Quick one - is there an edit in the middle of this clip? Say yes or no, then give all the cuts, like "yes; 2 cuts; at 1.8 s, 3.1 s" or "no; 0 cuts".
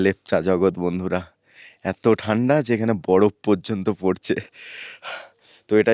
no; 0 cuts